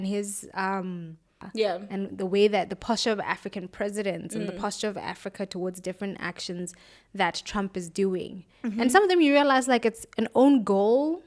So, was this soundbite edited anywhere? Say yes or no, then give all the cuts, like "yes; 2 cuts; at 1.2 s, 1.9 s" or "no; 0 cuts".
yes; 1 cut; at 1.4 s